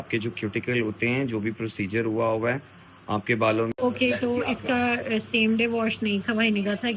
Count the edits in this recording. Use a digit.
1